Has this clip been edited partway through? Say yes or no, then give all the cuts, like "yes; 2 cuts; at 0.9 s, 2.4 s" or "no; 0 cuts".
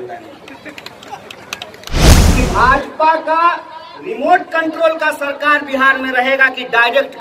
yes; 1 cut; at 2.1 s